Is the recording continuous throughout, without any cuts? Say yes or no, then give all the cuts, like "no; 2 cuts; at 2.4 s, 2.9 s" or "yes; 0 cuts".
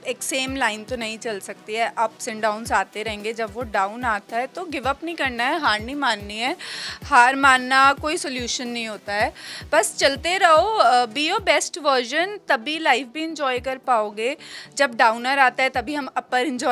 yes; 0 cuts